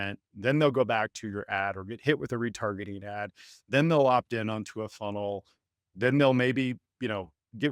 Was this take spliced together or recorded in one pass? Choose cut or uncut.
uncut